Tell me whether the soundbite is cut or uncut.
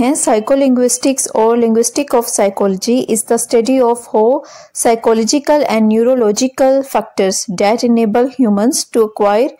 uncut